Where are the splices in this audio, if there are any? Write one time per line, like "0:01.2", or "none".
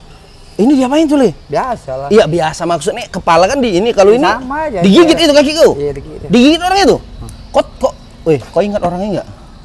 none